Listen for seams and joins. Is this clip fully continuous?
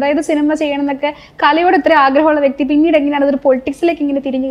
yes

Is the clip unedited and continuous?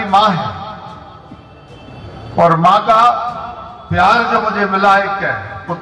yes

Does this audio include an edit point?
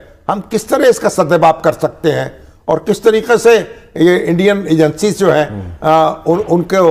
no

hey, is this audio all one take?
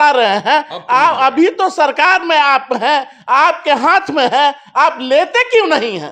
yes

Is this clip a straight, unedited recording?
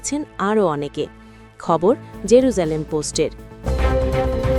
no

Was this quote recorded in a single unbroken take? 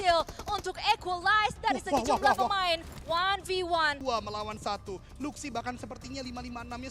no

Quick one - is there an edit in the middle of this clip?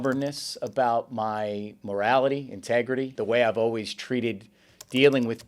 yes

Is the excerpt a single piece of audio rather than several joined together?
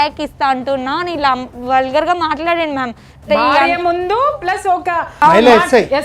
no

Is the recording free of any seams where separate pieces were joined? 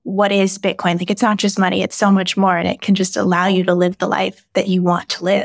yes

